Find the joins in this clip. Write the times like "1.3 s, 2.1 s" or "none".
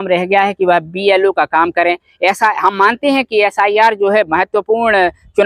none